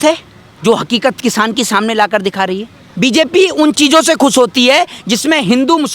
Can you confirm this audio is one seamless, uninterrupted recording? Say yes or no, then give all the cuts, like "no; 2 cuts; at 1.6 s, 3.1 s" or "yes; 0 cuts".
no; 1 cut; at 2.8 s